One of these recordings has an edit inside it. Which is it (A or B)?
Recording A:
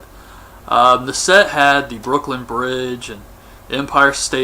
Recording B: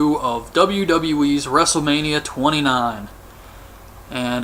A